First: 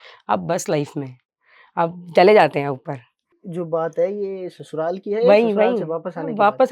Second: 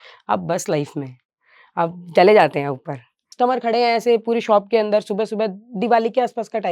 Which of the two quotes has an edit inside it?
second; 1 cut; at 3.3 s

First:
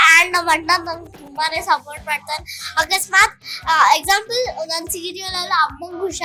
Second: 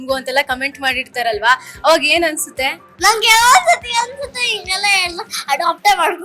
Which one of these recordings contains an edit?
second; 1 cut; at 2.8 s

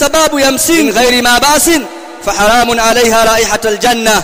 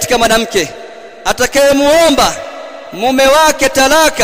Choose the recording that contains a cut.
first; 1 cut; at 0.9 s

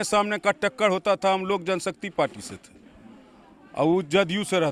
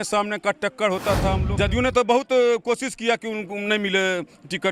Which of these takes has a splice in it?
second; 1 cut; at 1.5 s

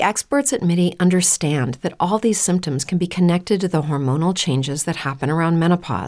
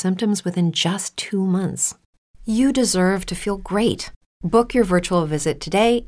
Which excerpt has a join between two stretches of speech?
second; 1 cut; at 1.0 s

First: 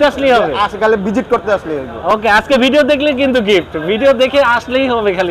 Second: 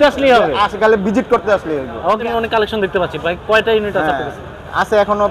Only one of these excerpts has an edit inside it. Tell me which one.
second; 1 cut; at 2.1 s

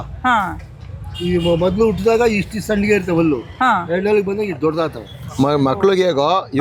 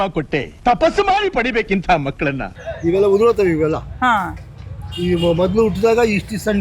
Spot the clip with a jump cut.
second; 1 cut; at 2.5 s

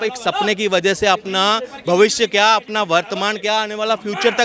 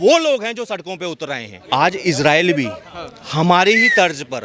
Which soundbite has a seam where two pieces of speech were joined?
second; 1 cut; at 1.5 s

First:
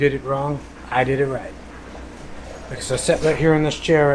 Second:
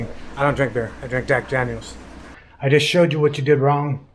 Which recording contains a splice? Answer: second; 1 cut; at 2.2 s

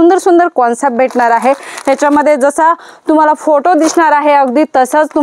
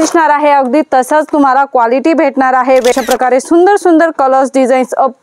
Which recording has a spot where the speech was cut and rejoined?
second; 1 cut; at 2.9 s

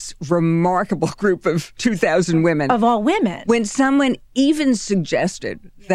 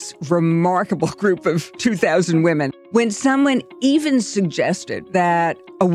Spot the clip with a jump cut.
second; 2 cuts; at 2.7 s, 4.9 s

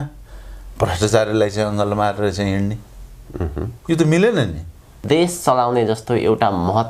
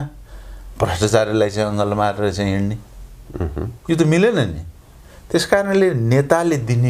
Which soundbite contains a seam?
first; 1 cut; at 5.0 s

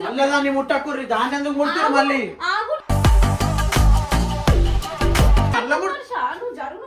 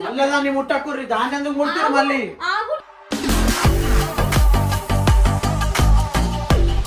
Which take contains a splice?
first; 2 cuts; at 2.9 s, 5.5 s

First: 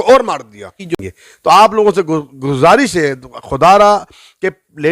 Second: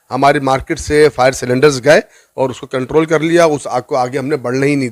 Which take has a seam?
first; 1 cut; at 0.9 s

